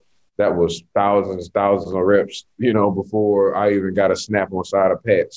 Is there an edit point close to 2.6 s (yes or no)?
no